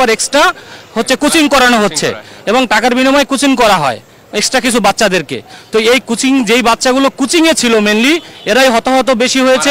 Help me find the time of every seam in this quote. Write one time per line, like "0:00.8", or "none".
none